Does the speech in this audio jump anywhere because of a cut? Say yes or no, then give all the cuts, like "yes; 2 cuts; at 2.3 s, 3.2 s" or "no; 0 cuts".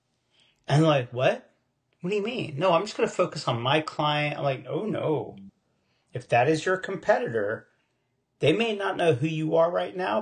no; 0 cuts